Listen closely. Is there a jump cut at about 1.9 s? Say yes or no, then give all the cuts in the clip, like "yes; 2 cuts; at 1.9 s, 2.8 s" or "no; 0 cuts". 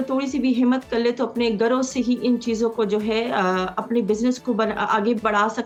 no; 0 cuts